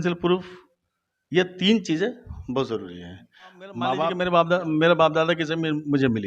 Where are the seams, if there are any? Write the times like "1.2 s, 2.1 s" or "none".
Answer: 4.1 s